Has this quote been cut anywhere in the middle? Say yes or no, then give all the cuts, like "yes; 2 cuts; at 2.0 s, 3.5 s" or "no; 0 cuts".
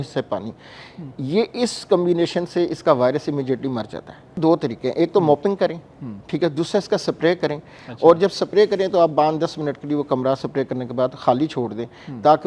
yes; 1 cut; at 4.4 s